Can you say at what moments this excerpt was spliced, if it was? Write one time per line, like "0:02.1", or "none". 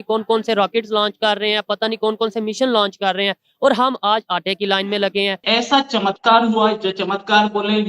0:05.4